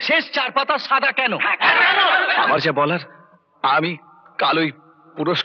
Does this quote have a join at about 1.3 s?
no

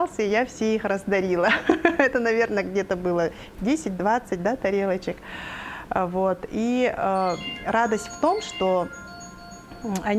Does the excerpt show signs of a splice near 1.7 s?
no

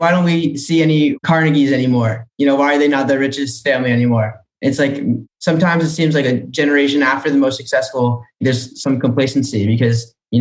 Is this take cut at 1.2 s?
yes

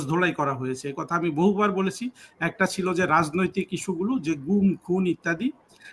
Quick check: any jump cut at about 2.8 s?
no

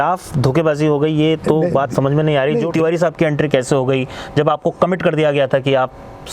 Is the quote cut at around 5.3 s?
no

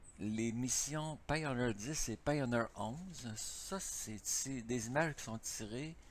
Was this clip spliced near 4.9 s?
yes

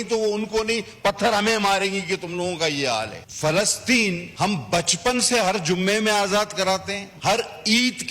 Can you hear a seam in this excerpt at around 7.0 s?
yes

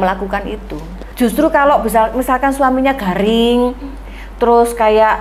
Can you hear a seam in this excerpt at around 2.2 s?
no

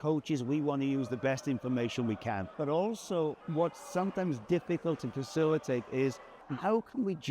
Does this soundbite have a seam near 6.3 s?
yes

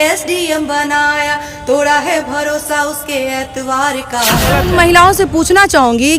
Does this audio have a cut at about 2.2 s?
no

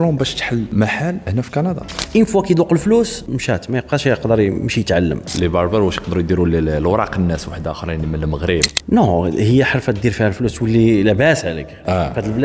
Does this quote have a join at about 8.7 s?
yes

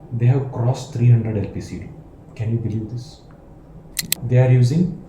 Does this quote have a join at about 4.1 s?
yes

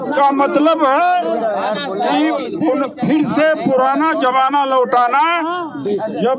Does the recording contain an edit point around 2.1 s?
no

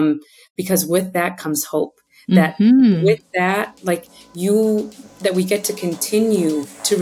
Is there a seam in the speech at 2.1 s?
no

